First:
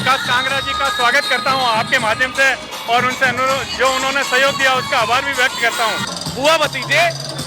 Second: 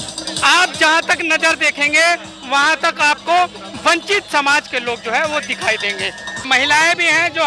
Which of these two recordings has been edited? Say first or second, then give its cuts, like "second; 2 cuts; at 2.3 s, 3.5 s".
first; 1 cut; at 6.1 s